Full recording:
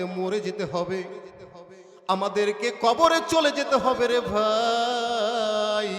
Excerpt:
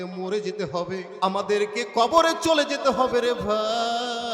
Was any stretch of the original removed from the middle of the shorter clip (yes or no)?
yes